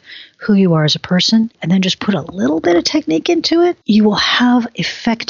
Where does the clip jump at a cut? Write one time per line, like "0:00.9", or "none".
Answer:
0:01.6
0:03.8